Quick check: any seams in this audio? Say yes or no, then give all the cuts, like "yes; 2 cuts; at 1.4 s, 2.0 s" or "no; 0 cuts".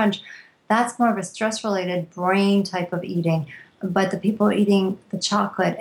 no; 0 cuts